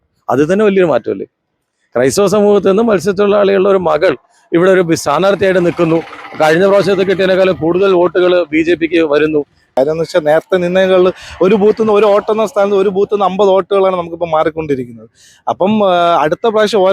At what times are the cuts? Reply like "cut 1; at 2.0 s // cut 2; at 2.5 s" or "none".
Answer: cut 1; at 9.7 s